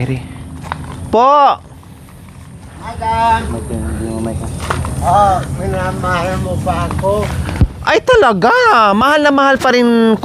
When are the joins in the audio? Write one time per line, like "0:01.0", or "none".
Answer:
none